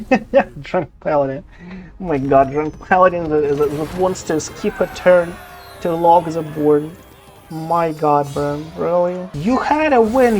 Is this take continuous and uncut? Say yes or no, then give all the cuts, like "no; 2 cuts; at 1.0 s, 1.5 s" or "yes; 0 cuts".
no; 1 cut; at 9.3 s